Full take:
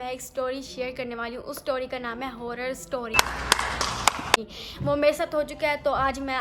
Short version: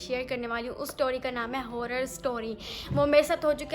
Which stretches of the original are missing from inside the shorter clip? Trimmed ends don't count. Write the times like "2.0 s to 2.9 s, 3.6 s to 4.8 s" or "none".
3.2 s to 4.4 s